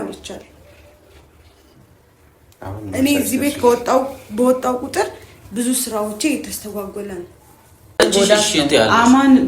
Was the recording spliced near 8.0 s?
yes; 1 cut; at 8.0 s

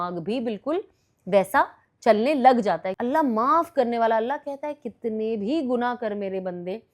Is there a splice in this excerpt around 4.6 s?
no; 1 cut; at 2.9 s

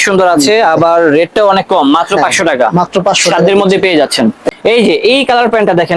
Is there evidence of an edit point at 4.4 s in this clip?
yes; 1 cut; at 4.4 s

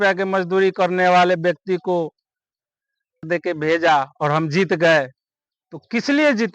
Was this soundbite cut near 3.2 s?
yes; 1 cut; at 3.2 s

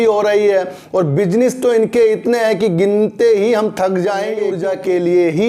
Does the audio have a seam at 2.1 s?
no; 1 cut; at 4.5 s

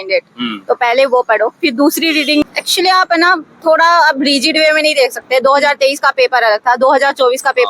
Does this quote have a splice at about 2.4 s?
yes; 1 cut; at 2.4 s

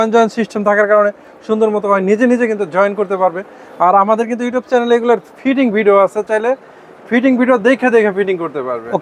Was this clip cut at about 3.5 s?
no; 0 cuts

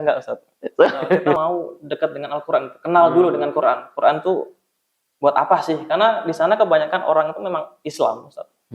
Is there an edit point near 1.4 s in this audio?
yes; 1 cut; at 1.4 s

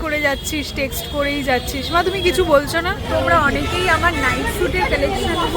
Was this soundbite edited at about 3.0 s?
yes; 1 cut; at 3.0 s

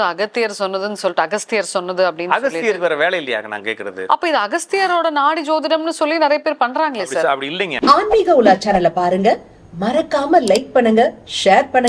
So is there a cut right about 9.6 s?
no; 1 cut; at 7.7 s

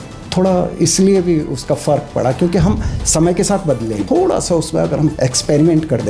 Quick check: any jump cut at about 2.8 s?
no; 2 cuts; at 4.0 s, 5.1 s

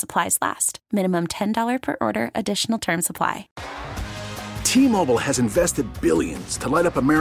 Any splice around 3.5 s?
yes; 1 cut; at 3.5 s

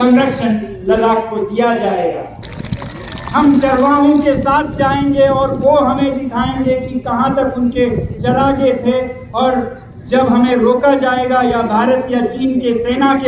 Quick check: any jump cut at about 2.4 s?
yes; 1 cut; at 2.4 s

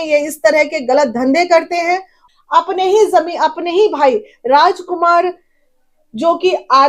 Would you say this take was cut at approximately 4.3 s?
no; 1 cut; at 2.2 s

